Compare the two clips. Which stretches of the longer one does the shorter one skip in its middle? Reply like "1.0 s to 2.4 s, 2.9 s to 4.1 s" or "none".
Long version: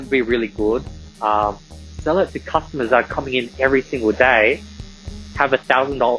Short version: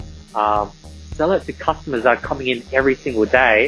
none